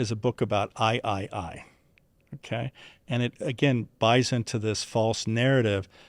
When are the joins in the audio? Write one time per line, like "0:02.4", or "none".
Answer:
none